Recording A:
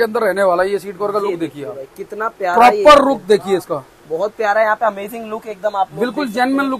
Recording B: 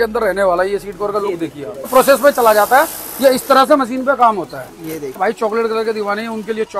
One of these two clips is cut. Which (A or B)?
B